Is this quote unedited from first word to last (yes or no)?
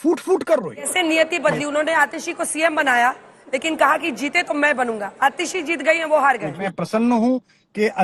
no